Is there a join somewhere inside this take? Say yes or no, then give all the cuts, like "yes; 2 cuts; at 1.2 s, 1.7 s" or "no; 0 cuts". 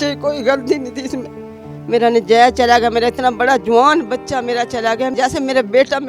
yes; 2 cuts; at 1.8 s, 5.1 s